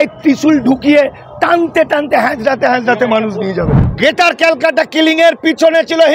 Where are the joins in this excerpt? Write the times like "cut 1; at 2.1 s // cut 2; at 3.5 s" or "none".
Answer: cut 1; at 3.9 s